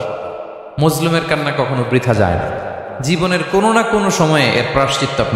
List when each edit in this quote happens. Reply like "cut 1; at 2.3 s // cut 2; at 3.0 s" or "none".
cut 1; at 2.9 s

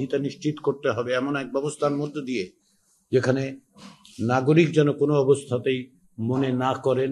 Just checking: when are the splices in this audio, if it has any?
none

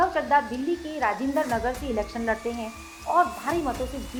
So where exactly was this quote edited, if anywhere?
none

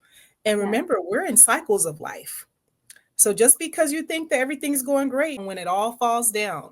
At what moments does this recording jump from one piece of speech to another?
cut 1; at 5.5 s

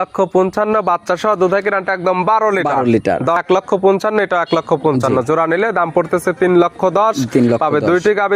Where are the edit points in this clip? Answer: cut 1; at 3.4 s

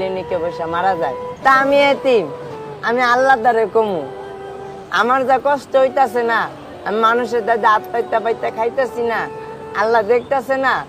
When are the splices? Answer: cut 1; at 1.3 s

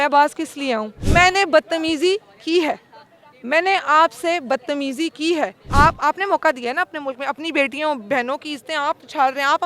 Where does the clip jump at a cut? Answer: cut 1; at 1.0 s // cut 2; at 5.7 s

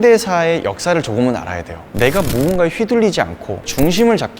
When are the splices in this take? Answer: cut 1; at 1.8 s

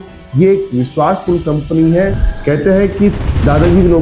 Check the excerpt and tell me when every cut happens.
cut 1; at 2.3 s

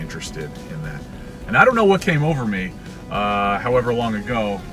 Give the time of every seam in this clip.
none

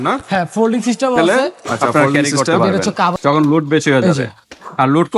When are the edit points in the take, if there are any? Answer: cut 1; at 3.1 s

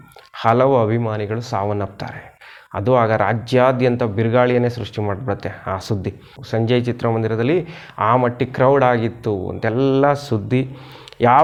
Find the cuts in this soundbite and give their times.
none

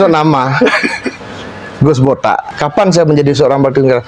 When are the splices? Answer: cut 1; at 2.5 s

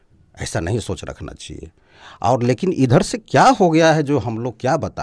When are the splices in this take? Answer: none

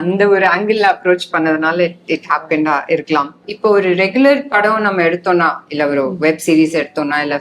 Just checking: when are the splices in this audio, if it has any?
cut 1; at 3.5 s

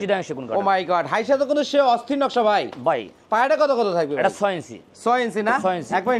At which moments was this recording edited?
none

